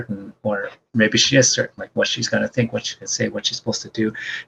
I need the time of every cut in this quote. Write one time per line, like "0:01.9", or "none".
none